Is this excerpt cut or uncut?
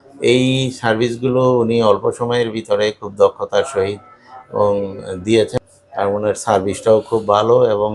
cut